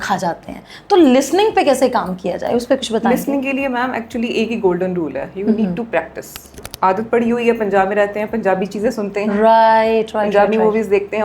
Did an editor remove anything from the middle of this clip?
yes; 1 cut; at 6.5 s

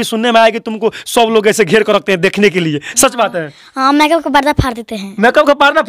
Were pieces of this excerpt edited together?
no; 0 cuts

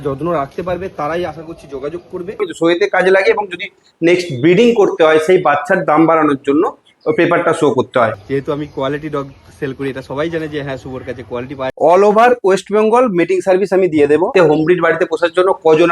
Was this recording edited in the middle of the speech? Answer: yes; 4 cuts; at 2.5 s, 8.2 s, 11.7 s, 14.3 s

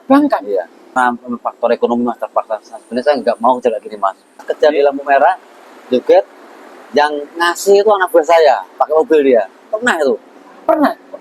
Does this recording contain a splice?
yes; 2 cuts; at 0.9 s, 4.5 s

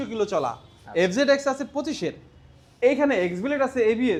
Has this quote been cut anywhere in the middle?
no; 0 cuts

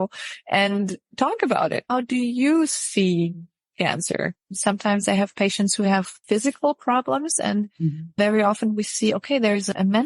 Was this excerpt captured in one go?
no; 1 cut; at 6.1 s

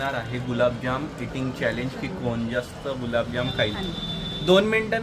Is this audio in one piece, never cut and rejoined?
yes; 0 cuts

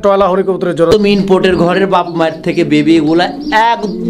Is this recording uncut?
no; 1 cut; at 0.9 s

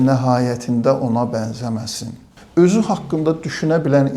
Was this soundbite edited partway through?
yes; 1 cut; at 2.3 s

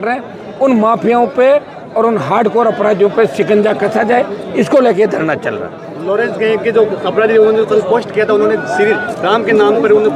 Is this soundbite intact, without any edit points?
yes; 0 cuts

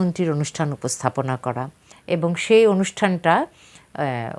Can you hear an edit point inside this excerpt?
yes; 1 cut; at 1.9 s

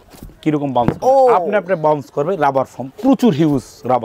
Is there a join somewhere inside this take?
no; 0 cuts

